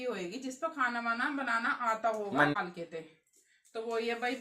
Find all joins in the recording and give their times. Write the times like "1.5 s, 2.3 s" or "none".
2.5 s